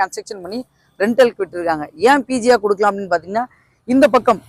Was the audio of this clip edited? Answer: no; 0 cuts

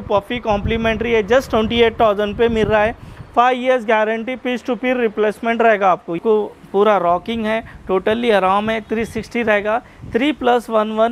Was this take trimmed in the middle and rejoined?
yes; 1 cut; at 6.2 s

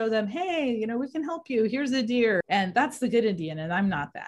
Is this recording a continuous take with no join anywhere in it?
no; 1 cut; at 2.4 s

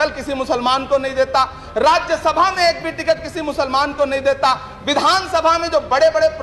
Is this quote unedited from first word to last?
yes; 0 cuts

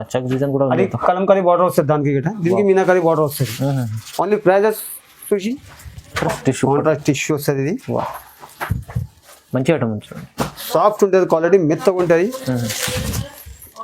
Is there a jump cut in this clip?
yes; 1 cut; at 6.2 s

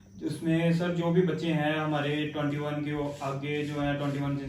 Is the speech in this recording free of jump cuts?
yes; 0 cuts

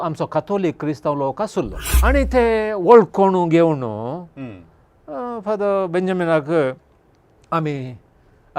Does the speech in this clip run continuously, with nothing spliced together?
no; 1 cut; at 1.8 s

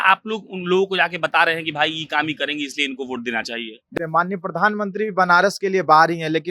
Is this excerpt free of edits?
no; 1 cut; at 3.9 s

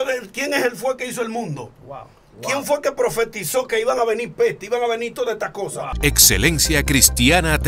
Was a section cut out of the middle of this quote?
yes; 1 cut; at 5.9 s

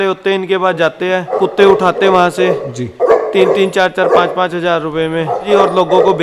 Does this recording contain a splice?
yes; 2 cuts; at 1.3 s, 5.4 s

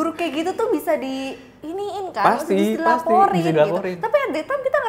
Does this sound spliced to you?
no; 0 cuts

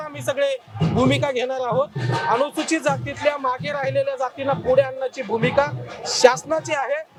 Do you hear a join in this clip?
no; 0 cuts

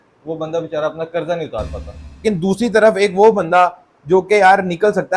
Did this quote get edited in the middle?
yes; 1 cut; at 2.2 s

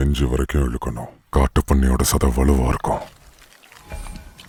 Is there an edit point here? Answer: no; 0 cuts

